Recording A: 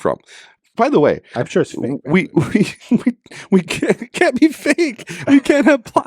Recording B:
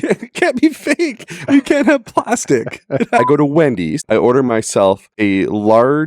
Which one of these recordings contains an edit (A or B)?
B